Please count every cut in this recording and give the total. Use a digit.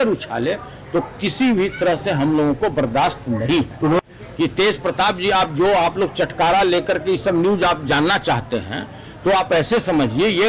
1